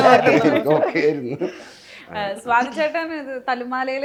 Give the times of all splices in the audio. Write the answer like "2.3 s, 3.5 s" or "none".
none